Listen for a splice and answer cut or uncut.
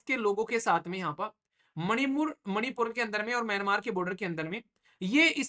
uncut